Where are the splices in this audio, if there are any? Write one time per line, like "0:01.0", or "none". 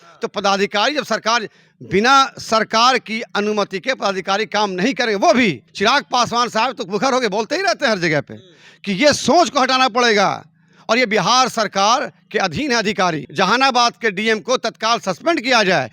0:05.7
0:13.2